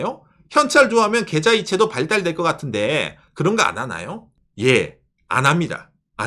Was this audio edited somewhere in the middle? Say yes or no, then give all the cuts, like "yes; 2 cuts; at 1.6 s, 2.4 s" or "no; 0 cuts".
yes; 1 cut; at 3.2 s